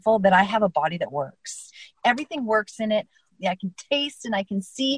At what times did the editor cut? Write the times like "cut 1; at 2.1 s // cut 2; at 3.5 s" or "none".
cut 1; at 1.9 s // cut 2; at 3.3 s